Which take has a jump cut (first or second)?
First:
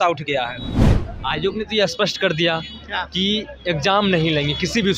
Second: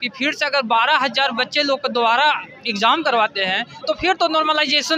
first